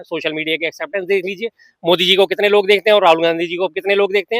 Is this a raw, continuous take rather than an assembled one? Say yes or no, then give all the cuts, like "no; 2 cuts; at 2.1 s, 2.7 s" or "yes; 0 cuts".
yes; 0 cuts